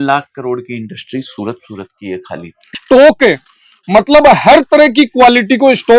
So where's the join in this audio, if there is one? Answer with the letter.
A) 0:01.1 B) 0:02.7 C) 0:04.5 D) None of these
B